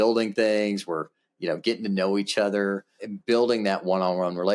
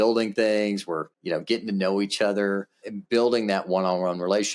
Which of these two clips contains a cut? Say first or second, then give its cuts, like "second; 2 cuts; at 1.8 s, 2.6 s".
second; 1 cut; at 1.1 s